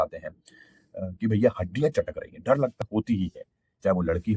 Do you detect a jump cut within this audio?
yes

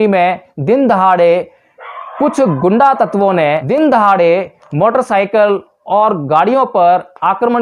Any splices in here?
yes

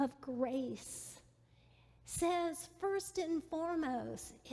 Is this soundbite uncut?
yes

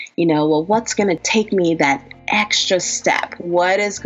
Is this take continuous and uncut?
no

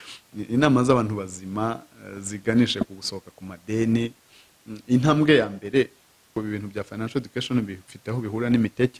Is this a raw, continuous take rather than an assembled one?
no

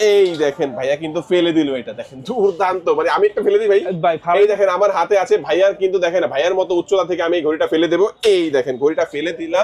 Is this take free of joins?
yes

